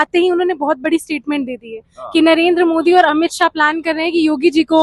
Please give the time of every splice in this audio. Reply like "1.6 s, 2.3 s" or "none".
none